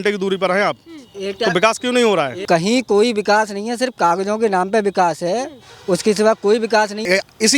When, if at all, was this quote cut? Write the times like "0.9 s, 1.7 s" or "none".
none